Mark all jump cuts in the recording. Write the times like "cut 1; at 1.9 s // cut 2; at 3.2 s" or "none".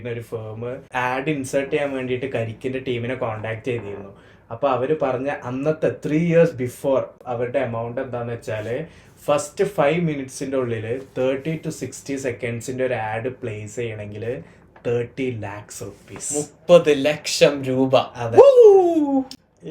cut 1; at 0.9 s // cut 2; at 7.2 s